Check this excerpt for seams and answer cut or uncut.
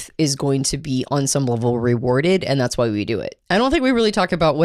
cut